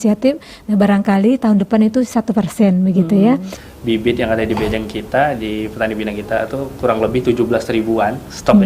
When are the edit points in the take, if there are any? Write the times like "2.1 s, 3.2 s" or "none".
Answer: 3.6 s